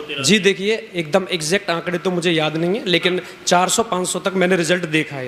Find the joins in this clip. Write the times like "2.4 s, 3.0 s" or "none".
none